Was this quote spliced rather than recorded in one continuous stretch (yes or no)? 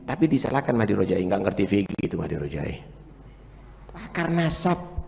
yes